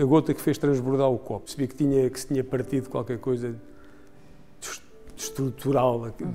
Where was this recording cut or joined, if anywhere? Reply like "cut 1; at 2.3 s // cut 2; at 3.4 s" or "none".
cut 1; at 1.5 s